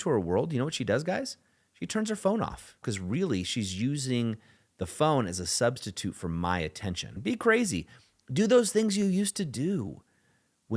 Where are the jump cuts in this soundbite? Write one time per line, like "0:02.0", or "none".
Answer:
0:02.9
0:07.1

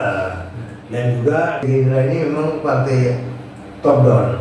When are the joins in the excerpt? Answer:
0:01.6

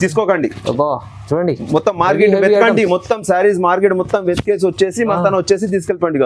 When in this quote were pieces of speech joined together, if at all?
none

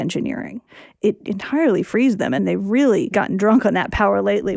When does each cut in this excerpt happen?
0:01.1
0:02.4
0:03.1

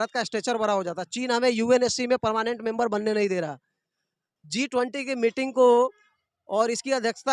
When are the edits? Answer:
none

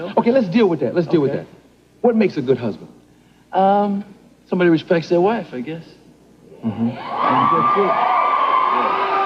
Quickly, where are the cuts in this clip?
none

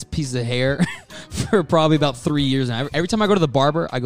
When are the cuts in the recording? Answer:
0:02.7

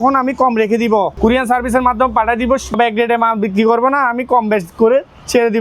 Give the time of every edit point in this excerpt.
0:01.1
0:02.7

